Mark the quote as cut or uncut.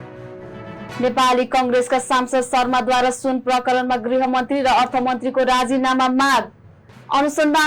uncut